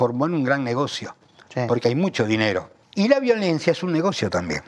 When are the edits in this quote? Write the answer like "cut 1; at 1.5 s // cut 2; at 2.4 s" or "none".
cut 1; at 2.8 s